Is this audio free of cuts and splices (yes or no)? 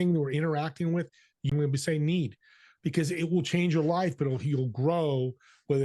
no